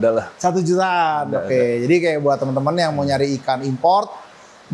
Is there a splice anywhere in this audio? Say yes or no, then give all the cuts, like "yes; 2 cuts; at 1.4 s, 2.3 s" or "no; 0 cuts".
no; 0 cuts